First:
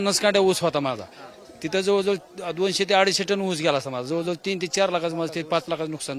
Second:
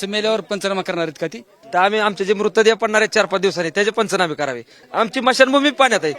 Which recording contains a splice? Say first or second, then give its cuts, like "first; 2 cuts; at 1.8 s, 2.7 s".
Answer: second; 2 cuts; at 1.6 s, 4.8 s